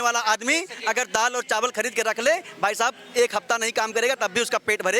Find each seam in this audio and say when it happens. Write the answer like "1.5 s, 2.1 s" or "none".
none